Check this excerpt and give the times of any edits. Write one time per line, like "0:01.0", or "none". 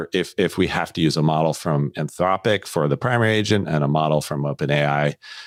none